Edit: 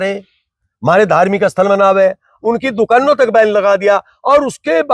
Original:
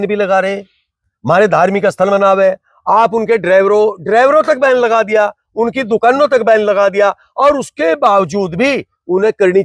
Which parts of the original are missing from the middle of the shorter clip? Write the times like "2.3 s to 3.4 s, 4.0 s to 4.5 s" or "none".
2.7 s to 5.4 s